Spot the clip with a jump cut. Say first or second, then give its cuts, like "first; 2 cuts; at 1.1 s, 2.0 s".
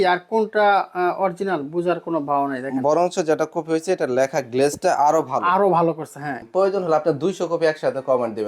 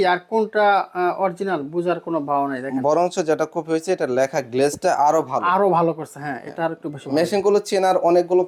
first; 1 cut; at 6.4 s